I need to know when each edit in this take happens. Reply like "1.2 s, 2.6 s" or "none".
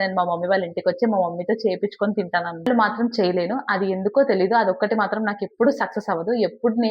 2.7 s